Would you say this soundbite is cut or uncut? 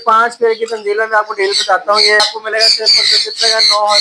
cut